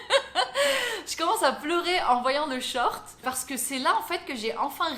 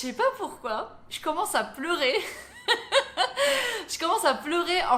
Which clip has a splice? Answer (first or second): first